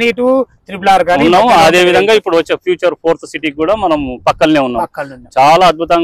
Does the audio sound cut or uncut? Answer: uncut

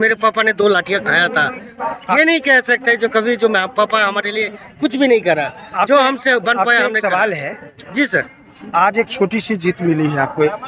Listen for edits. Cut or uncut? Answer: uncut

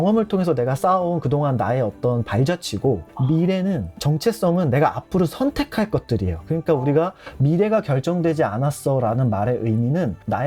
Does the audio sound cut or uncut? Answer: uncut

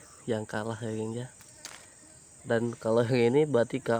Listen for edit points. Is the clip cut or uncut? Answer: uncut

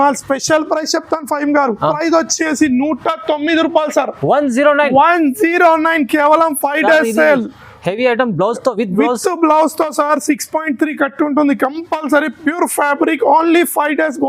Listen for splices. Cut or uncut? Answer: cut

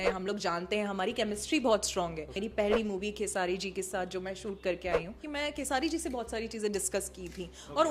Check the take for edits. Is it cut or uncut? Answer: cut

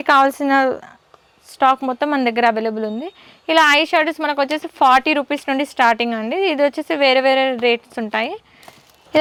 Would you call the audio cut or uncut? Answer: uncut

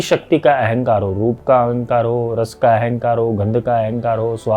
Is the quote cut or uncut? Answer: uncut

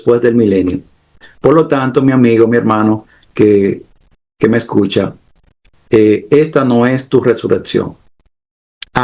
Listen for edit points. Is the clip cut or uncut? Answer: uncut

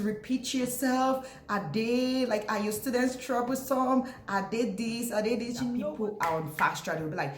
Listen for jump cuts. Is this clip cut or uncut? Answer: cut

